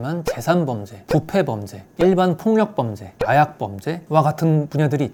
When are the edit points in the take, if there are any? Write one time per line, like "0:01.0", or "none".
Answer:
none